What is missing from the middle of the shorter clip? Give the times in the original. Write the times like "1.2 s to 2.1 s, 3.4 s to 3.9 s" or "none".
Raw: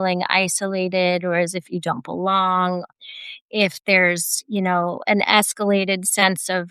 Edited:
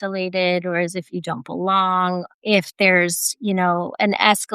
2.9 s to 3.4 s